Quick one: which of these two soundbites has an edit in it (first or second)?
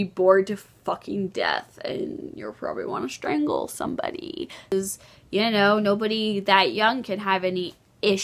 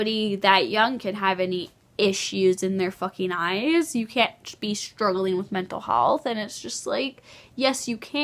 first